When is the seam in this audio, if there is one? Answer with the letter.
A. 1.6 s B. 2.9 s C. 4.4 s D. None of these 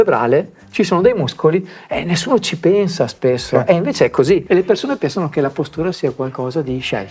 C